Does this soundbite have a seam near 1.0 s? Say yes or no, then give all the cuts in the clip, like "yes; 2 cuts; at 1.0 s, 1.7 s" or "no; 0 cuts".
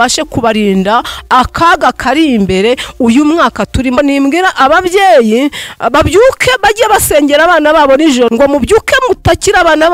no; 2 cuts; at 4.0 s, 8.3 s